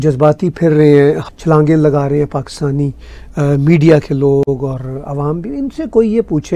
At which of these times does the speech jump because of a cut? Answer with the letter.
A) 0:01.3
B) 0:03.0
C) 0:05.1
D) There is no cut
A